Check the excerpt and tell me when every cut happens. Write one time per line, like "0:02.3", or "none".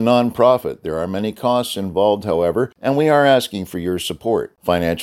0:02.7